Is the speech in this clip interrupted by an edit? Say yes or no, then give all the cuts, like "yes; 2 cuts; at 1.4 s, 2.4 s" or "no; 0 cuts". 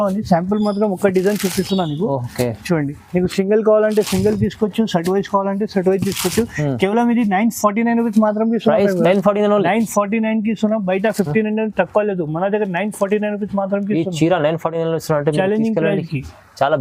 no; 0 cuts